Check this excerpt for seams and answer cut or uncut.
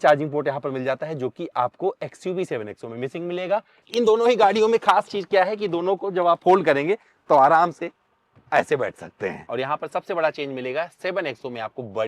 cut